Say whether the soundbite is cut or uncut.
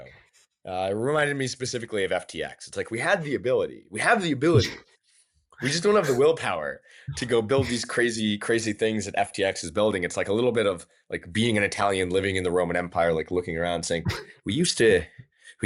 uncut